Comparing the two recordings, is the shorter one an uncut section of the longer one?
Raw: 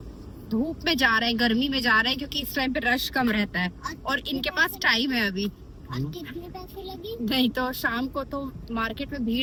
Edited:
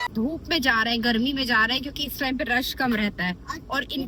yes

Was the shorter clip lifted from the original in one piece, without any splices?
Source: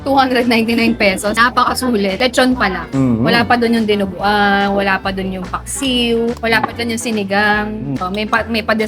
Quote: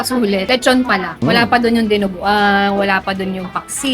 no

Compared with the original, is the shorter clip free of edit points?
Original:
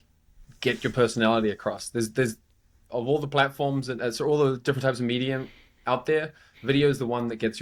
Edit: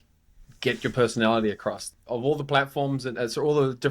no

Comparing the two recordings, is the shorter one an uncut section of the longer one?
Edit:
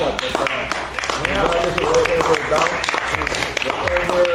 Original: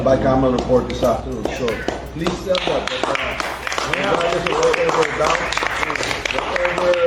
yes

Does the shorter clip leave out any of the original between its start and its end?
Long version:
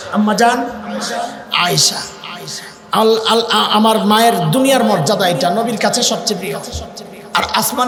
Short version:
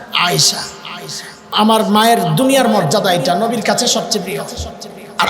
yes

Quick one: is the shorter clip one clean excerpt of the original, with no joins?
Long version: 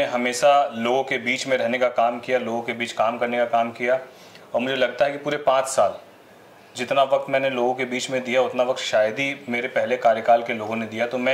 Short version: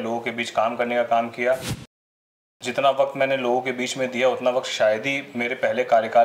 no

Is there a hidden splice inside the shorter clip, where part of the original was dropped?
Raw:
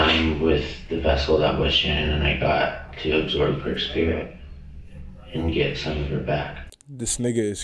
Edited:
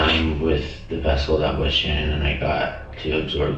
no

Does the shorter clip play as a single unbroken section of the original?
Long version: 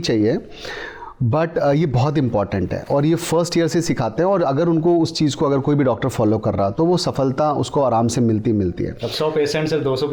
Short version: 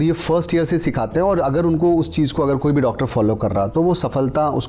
yes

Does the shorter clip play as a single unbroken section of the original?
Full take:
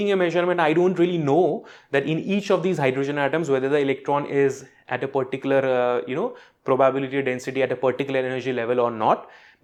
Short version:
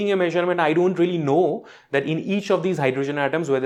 yes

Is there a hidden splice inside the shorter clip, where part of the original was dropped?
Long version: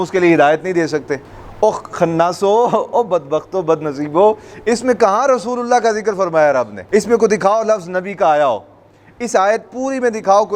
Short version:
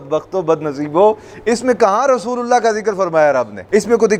no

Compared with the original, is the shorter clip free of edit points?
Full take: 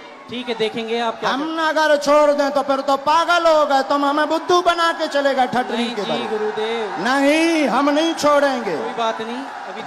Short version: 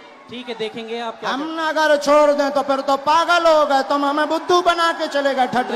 yes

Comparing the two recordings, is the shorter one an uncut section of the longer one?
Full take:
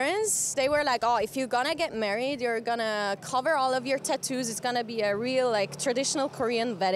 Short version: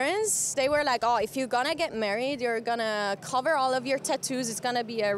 yes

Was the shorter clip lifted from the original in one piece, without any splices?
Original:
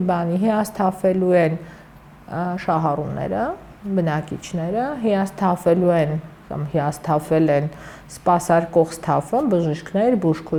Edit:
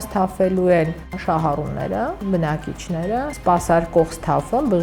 no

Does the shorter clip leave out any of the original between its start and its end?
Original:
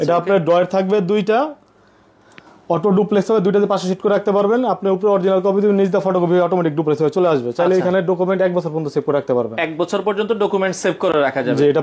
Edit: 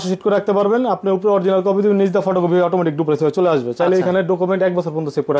no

